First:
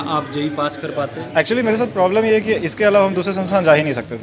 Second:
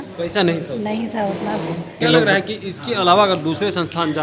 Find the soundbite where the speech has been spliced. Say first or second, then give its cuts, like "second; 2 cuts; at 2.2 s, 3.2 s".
second; 1 cut; at 2.0 s